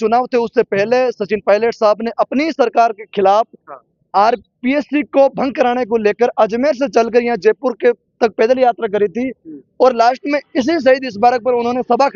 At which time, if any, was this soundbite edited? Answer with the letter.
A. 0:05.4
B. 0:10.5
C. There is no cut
C